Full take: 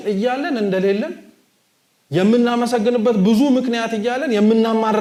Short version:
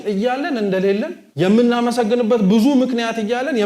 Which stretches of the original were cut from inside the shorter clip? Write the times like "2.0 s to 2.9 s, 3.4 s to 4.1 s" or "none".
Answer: 1.2 s to 2.0 s